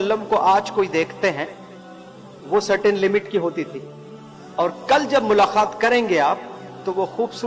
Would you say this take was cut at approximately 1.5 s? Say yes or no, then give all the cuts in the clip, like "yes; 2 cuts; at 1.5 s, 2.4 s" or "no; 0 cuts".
no; 0 cuts